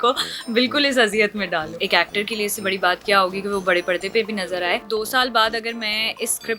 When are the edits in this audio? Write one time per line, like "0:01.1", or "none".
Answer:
0:01.7
0:04.8